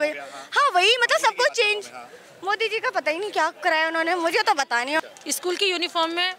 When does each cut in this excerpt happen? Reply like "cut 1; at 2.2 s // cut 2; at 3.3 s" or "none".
cut 1; at 5.0 s